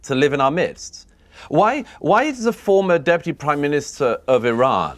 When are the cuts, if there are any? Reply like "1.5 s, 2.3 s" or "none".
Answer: 1.2 s